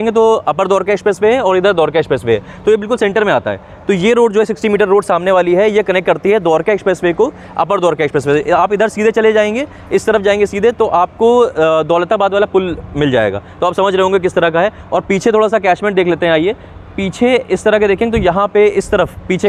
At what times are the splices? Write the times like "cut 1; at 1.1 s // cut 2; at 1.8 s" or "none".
none